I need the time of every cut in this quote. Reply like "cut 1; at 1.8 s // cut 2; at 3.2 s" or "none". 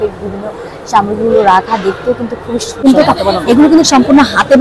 cut 1; at 2.8 s